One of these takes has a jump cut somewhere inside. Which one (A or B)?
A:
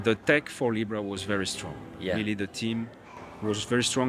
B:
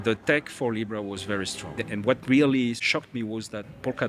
B